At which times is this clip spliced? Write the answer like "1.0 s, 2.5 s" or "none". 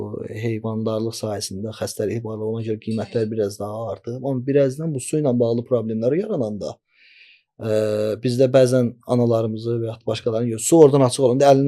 none